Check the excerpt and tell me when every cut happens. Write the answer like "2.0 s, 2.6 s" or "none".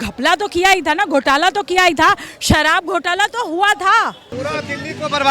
4.3 s